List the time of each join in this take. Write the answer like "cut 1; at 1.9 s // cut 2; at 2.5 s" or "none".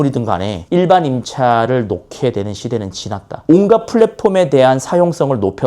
cut 1; at 3.4 s